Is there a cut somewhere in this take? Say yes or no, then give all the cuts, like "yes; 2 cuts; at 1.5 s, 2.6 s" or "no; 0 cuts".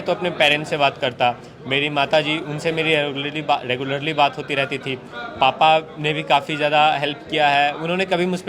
no; 0 cuts